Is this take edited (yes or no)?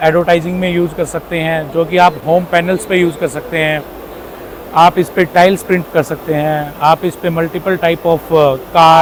no